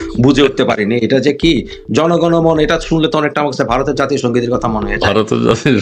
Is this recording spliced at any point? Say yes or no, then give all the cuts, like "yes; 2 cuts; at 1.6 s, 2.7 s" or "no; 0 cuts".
no; 0 cuts